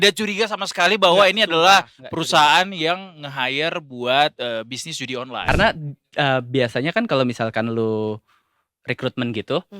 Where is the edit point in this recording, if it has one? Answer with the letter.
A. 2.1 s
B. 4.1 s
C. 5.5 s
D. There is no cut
C